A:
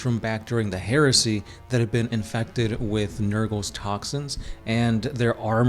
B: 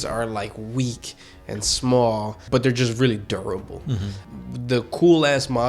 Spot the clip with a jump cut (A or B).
B